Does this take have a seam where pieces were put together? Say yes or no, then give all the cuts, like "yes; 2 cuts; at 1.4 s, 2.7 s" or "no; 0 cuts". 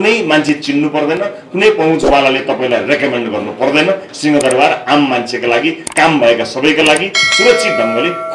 no; 0 cuts